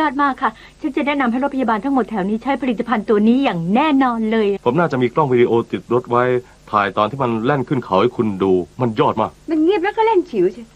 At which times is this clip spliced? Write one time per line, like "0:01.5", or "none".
0:04.6